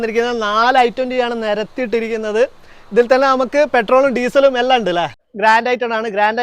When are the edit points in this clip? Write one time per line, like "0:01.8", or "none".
0:05.2